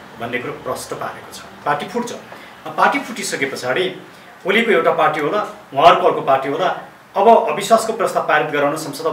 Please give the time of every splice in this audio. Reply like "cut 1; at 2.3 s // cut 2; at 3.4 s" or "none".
cut 1; at 1.6 s